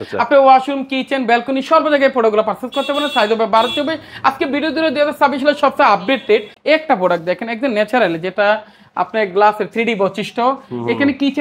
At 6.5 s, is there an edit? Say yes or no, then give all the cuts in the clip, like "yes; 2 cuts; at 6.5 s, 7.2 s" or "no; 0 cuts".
yes; 1 cut; at 6.5 s